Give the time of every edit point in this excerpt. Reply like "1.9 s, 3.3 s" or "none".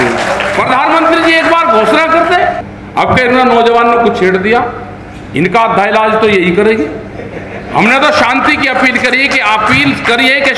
2.7 s